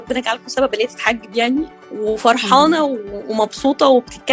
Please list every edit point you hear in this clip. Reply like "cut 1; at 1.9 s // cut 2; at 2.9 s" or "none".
none